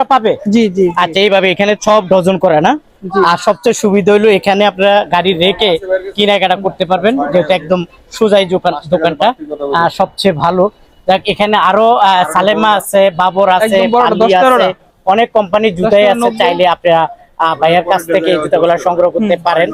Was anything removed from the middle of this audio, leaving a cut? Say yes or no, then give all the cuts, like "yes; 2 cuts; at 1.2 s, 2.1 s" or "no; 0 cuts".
no; 0 cuts